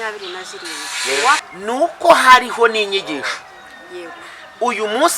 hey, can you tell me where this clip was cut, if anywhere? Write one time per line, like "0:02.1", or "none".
0:01.5